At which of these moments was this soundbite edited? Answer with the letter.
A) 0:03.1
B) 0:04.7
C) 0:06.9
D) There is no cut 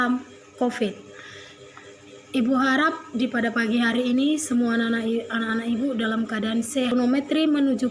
C